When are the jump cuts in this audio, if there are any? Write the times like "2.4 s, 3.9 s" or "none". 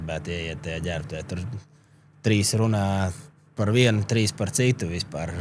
none